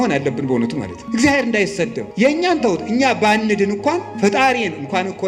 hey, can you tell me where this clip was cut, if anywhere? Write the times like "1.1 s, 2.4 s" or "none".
0.9 s, 2.0 s, 4.1 s